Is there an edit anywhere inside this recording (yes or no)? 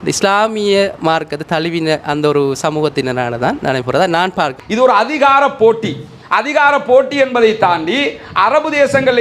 yes